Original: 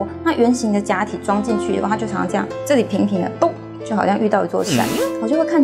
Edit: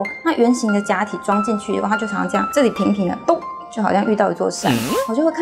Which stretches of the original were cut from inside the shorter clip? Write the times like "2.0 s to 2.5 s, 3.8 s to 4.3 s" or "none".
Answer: 2.5 s to 2.6 s